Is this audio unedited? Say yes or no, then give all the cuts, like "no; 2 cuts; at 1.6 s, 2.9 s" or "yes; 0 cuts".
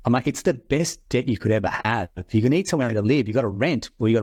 yes; 0 cuts